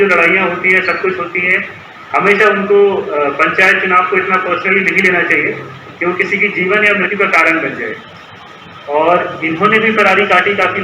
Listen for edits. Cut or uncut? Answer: cut